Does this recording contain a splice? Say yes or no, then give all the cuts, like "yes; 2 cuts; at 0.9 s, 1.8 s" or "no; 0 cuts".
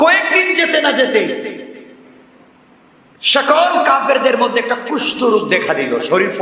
no; 0 cuts